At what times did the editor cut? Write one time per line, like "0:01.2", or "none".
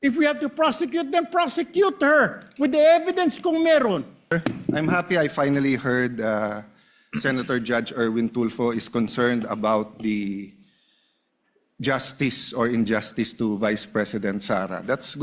0:04.3